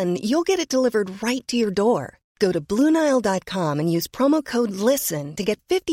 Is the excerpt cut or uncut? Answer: uncut